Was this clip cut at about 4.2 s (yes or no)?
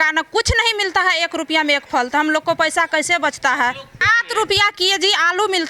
yes